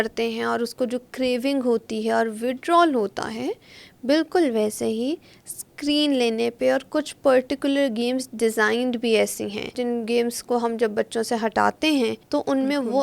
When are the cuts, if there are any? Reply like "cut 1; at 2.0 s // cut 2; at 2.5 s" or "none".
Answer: cut 1; at 9.8 s // cut 2; at 12.2 s